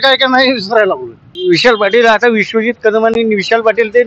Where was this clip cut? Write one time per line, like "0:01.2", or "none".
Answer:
0:01.1